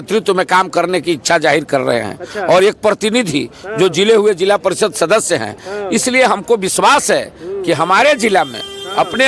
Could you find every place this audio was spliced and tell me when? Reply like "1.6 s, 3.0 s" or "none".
none